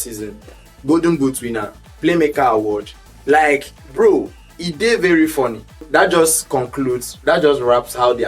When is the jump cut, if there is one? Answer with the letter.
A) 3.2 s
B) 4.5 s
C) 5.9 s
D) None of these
C